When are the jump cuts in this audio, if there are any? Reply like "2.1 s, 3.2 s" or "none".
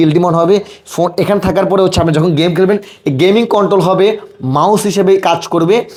none